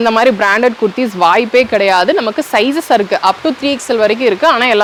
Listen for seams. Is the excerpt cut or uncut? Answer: uncut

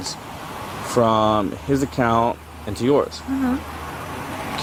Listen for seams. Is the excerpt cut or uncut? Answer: uncut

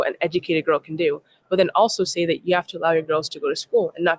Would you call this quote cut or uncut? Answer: uncut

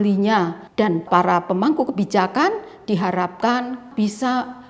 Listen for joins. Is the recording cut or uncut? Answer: cut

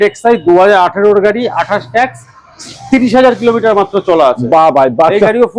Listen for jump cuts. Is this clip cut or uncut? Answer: uncut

